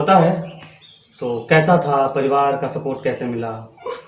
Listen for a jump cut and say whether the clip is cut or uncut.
uncut